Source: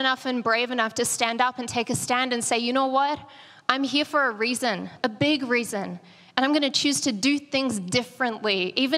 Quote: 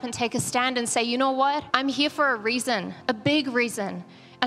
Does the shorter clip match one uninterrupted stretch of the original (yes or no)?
no